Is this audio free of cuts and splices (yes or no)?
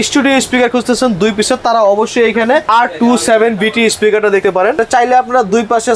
no